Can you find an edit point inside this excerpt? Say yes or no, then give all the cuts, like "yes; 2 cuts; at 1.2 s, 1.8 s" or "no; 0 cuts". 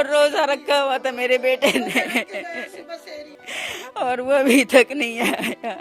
yes; 1 cut; at 3.4 s